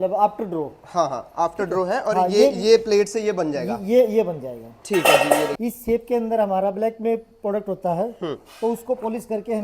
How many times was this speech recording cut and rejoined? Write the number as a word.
one